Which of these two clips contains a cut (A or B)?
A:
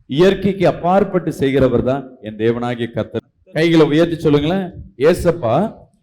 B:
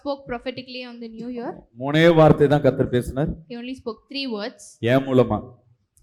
A